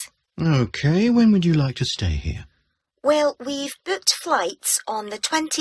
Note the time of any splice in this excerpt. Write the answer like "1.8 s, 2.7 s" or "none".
none